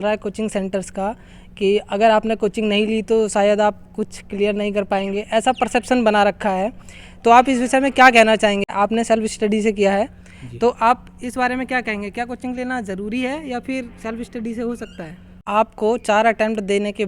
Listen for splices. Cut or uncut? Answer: cut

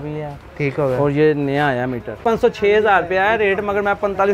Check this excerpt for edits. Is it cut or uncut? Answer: cut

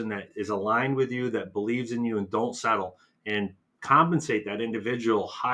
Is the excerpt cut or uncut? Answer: uncut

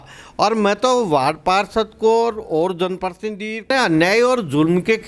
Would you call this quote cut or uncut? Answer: cut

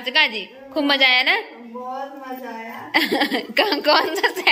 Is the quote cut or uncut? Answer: uncut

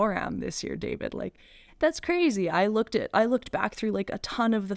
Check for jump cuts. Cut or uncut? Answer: uncut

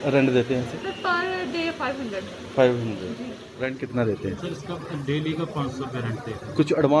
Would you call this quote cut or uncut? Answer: cut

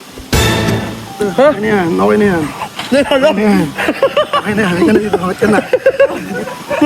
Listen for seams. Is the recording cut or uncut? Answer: uncut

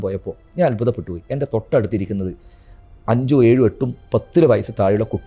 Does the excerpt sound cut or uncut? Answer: uncut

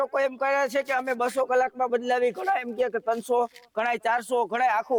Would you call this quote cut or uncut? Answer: uncut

